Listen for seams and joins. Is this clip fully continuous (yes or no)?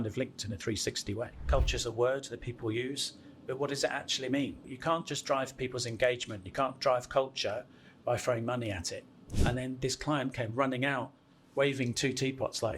no